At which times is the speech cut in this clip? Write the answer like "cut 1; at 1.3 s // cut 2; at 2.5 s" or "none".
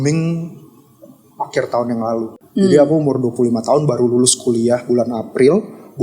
cut 1; at 2.4 s